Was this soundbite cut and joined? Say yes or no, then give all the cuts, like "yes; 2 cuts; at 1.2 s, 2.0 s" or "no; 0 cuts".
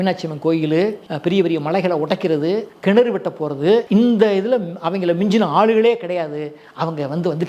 yes; 3 cuts; at 1.1 s, 2.7 s, 3.9 s